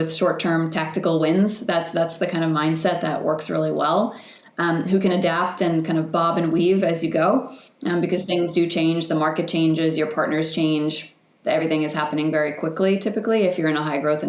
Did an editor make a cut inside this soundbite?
no; 0 cuts

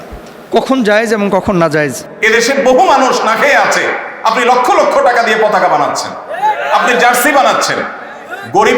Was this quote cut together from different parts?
yes; 1 cut; at 2.1 s

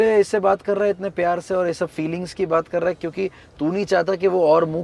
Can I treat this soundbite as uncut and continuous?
yes; 0 cuts

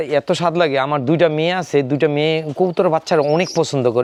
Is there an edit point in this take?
no; 0 cuts

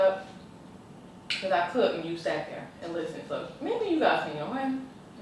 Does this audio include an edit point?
no; 0 cuts

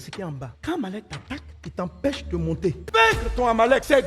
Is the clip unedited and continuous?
no; 1 cut; at 2.8 s

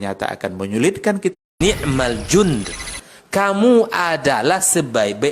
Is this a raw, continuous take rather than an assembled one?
no; 1 cut; at 1.5 s

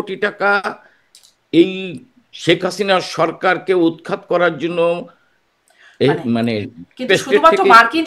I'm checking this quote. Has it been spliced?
no; 0 cuts

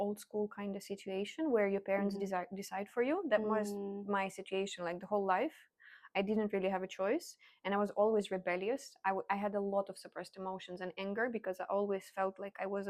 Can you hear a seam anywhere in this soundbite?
no; 0 cuts

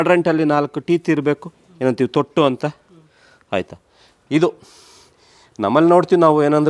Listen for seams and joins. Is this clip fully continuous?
yes; 0 cuts

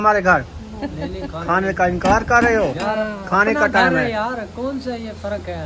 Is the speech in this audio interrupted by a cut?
no; 0 cuts

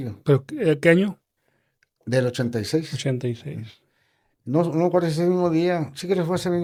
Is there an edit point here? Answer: no; 0 cuts

